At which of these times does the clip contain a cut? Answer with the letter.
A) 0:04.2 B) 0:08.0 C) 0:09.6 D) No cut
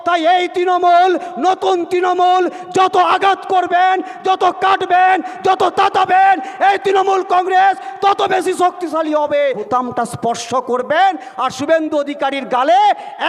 C